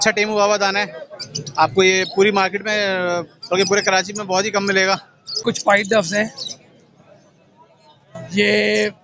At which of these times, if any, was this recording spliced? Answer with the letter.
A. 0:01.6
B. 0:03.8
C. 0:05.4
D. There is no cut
C